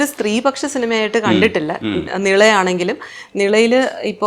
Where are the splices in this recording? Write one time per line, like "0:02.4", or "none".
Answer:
none